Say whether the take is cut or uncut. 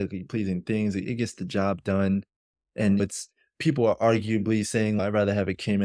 cut